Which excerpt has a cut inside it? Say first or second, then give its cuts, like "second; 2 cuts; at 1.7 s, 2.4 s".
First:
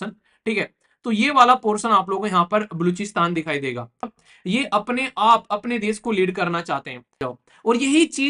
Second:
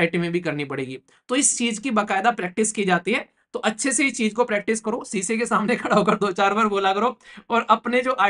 first; 2 cuts; at 4.1 s, 7.3 s